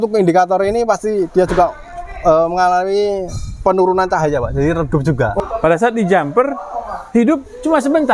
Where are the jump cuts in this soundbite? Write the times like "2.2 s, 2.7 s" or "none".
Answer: 5.4 s